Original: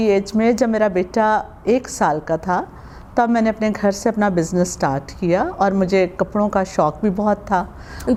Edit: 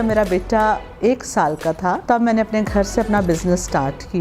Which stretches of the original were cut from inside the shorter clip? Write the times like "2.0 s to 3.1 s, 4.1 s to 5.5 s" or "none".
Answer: 2.6 s to 3.1 s